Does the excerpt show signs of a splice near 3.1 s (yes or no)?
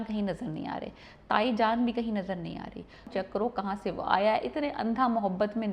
yes